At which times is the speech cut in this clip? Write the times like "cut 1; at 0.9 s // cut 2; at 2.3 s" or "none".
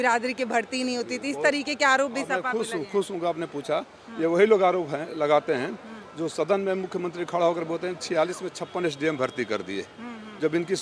none